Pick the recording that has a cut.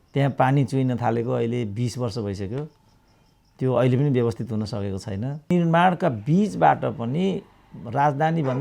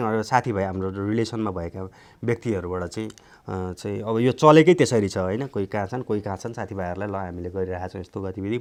first; 1 cut; at 5.5 s

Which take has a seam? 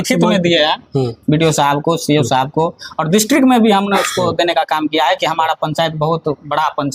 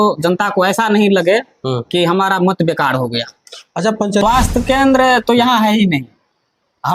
second; 1 cut; at 4.2 s

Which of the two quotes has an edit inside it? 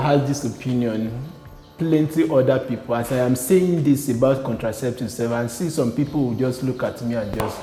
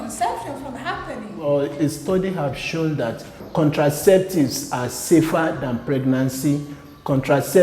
second; 2 cuts; at 1.3 s, 3.4 s

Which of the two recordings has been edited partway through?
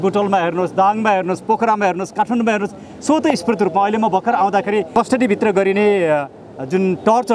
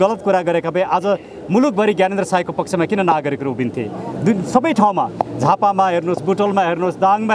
first; 1 cut; at 4.9 s

